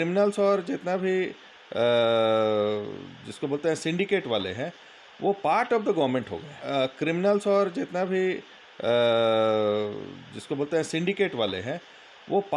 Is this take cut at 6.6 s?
yes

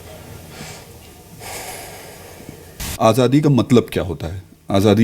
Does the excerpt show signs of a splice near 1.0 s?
no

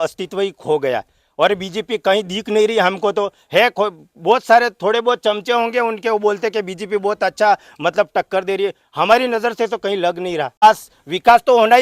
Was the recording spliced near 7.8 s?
no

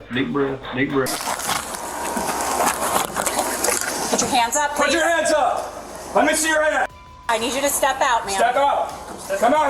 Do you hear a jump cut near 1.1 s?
yes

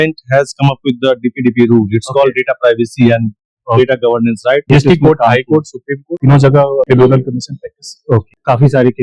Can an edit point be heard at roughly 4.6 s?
yes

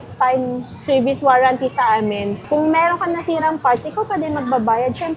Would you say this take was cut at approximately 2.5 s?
no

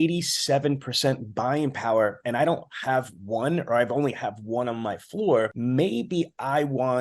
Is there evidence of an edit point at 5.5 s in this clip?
yes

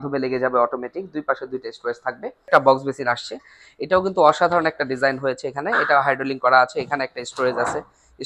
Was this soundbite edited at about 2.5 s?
yes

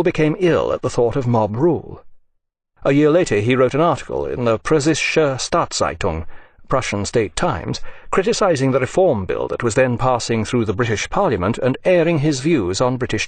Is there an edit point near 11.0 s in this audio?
no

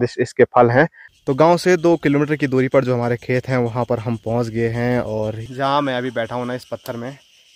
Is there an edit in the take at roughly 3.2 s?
no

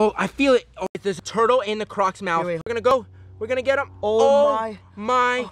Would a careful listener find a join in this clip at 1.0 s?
yes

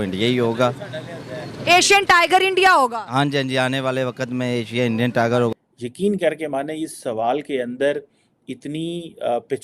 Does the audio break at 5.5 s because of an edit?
yes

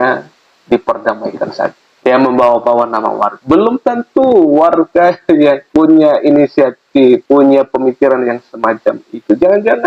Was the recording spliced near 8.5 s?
no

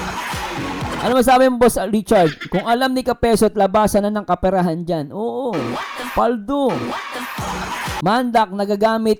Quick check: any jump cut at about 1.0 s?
no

